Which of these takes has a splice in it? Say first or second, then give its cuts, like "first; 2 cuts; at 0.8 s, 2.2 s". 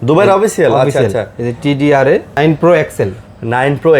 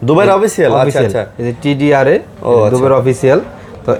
first; 1 cut; at 2.4 s